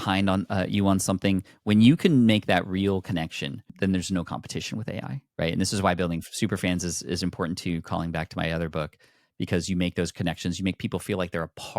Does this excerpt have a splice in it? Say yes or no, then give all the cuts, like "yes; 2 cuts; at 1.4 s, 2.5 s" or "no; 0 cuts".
yes; 2 cuts; at 3.6 s, 5.2 s